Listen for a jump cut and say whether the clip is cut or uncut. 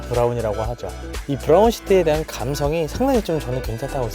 cut